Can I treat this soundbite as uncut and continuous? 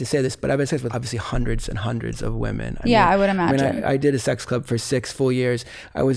no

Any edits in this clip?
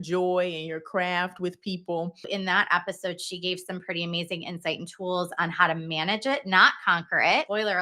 yes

